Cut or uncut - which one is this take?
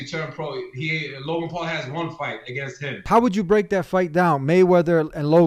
cut